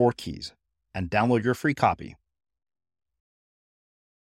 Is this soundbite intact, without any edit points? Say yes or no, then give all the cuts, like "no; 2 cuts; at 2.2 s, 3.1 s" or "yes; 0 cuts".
yes; 0 cuts